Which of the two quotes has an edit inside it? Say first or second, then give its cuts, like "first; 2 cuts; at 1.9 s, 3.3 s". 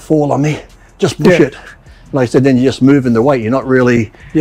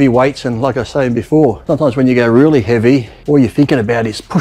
second; 2 cuts; at 1.6 s, 3.1 s